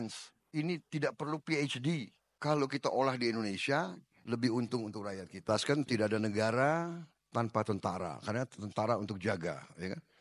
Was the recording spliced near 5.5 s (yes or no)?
yes